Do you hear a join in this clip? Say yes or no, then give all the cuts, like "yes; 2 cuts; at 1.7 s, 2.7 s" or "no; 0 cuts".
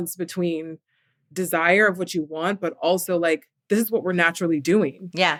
no; 0 cuts